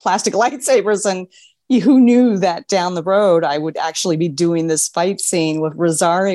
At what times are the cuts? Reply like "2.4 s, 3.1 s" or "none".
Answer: none